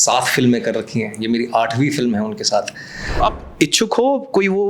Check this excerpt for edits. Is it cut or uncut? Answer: cut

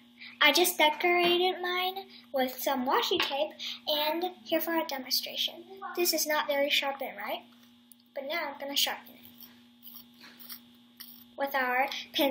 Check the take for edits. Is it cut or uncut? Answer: uncut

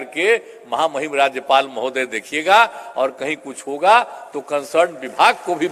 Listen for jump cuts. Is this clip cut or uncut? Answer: uncut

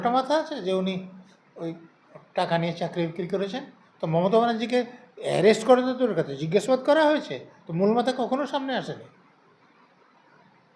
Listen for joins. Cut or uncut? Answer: uncut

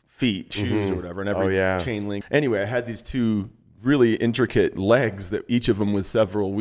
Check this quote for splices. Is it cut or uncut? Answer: cut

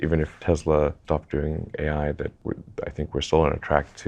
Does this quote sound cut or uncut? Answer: uncut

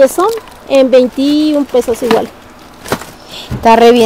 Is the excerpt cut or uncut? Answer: uncut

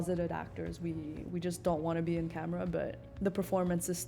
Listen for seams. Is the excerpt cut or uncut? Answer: cut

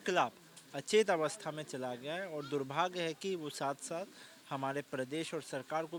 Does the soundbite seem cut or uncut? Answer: uncut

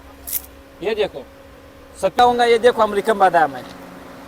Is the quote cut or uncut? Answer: cut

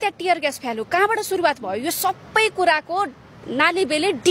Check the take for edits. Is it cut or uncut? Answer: uncut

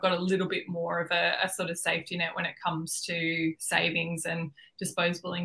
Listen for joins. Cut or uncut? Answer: uncut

